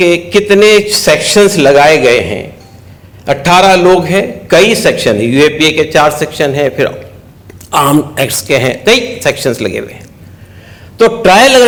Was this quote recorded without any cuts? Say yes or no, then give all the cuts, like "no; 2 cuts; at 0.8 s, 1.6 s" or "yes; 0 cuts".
yes; 0 cuts